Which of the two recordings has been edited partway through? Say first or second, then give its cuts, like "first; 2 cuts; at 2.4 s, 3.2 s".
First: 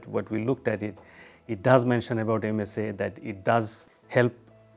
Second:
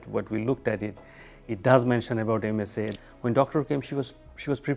second; 1 cut; at 2.9 s